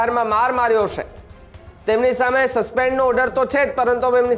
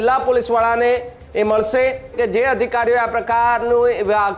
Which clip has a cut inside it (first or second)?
second